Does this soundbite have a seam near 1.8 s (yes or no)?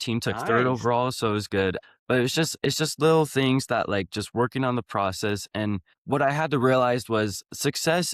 yes